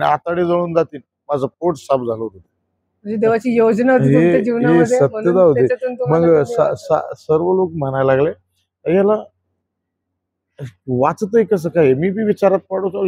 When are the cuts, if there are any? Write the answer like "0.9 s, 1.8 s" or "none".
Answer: none

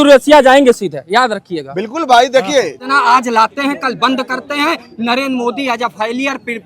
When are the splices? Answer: 2.8 s

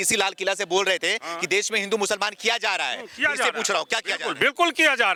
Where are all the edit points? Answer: none

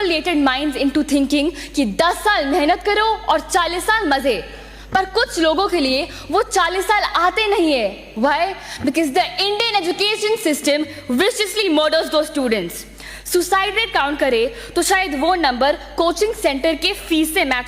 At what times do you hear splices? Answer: none

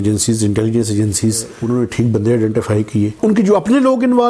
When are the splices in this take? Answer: 1.5 s, 3.1 s

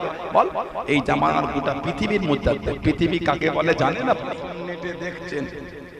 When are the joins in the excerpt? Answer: 4.5 s

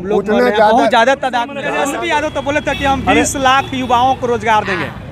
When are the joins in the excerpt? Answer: 1.7 s

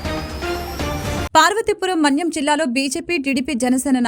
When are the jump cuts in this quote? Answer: 1.3 s

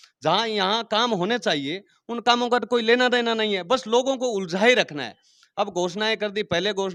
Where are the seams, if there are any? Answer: none

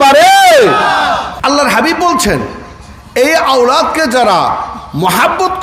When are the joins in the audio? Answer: 1.3 s

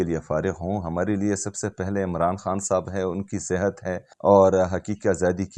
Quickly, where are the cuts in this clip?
4.1 s

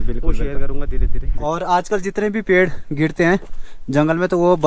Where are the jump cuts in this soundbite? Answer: 1.2 s

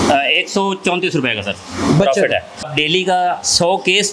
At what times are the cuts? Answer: 2.6 s

